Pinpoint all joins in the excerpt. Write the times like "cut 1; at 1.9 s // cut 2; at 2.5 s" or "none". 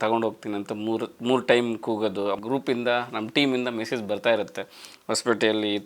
cut 1; at 2.4 s